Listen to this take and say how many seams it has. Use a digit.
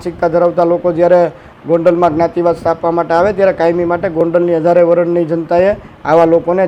0